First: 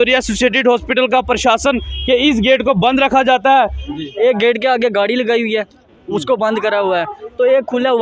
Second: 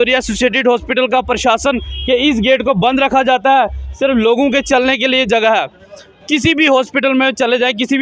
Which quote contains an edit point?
first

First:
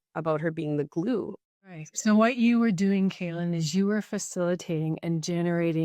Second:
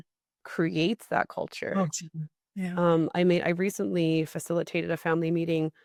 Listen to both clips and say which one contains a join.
first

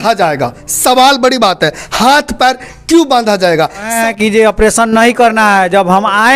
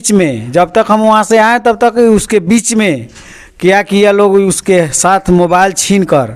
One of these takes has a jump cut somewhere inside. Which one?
first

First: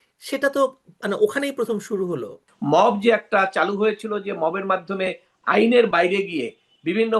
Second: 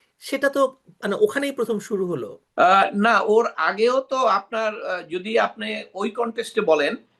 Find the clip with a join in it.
first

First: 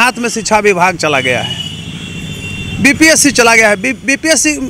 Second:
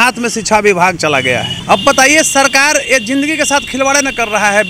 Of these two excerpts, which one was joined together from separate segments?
second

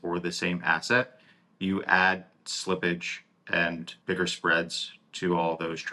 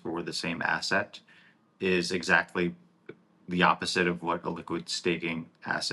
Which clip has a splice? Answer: first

